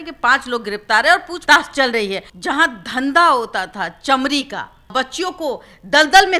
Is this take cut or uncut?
cut